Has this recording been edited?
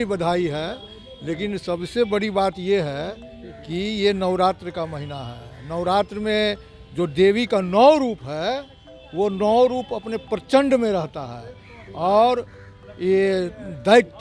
no; 0 cuts

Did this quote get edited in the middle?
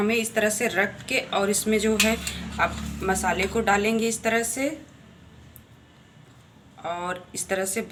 no; 0 cuts

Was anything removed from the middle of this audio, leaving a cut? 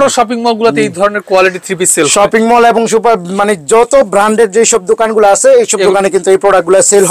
no; 0 cuts

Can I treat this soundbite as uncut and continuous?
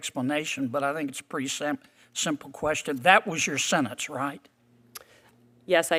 yes; 0 cuts

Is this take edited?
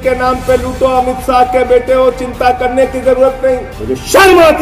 yes; 1 cut; at 3.7 s

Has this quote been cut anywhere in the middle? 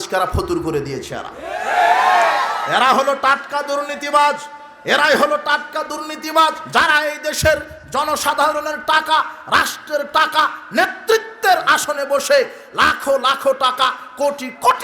yes; 1 cut; at 6.6 s

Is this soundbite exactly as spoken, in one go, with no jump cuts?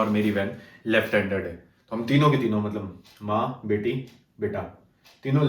yes; 0 cuts

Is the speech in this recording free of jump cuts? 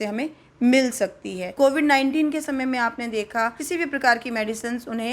no; 2 cuts; at 1.6 s, 3.6 s

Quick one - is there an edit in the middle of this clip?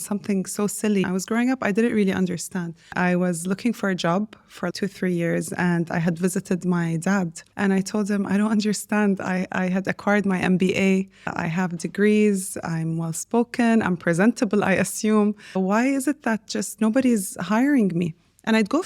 yes; 7 cuts; at 1.1 s, 2.9 s, 4.7 s, 7.4 s, 11.3 s, 15.6 s, 16.7 s

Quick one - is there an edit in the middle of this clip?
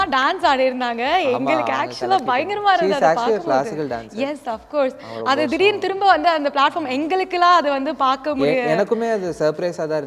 no; 0 cuts

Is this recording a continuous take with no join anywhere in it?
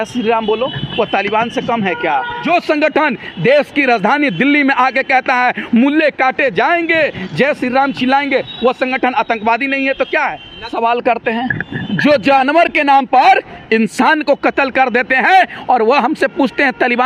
no; 2 cuts; at 2.4 s, 10.7 s

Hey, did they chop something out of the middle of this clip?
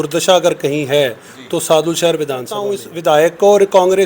yes; 1 cut; at 2.9 s

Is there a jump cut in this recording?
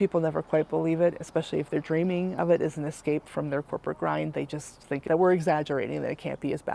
no; 0 cuts

